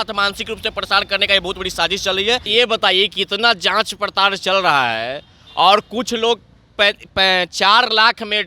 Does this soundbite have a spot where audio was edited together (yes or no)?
yes